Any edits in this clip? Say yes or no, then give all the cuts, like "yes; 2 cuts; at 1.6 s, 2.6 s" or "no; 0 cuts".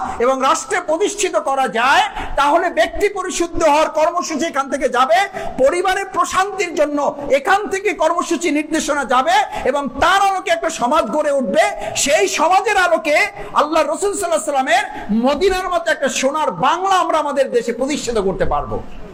no; 0 cuts